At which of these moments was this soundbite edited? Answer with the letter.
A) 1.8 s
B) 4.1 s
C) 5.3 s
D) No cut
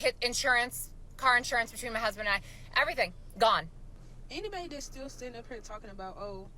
B